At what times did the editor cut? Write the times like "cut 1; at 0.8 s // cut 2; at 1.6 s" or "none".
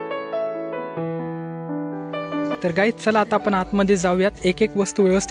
cut 1; at 2.6 s